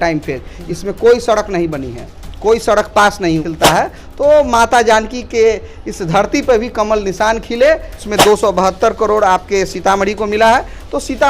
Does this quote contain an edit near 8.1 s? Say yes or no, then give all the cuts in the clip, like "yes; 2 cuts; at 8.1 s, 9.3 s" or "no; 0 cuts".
yes; 2 cuts; at 3.4 s, 8.1 s